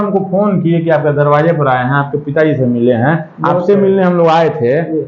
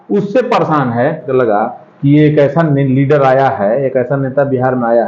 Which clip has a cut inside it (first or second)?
second